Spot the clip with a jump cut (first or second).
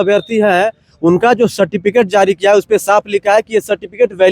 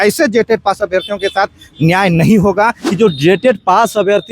second